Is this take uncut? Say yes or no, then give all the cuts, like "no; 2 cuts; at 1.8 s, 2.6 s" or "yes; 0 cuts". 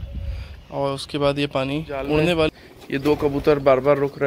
no; 1 cut; at 2.5 s